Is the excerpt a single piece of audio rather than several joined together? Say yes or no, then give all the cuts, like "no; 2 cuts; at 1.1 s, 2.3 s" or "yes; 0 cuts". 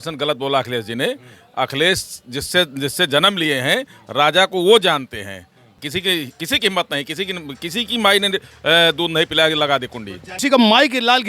no; 2 cuts; at 5.8 s, 10.4 s